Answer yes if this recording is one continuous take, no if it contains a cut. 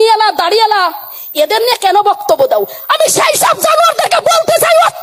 yes